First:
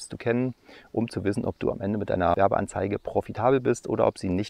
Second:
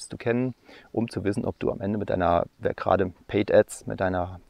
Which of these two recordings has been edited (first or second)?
first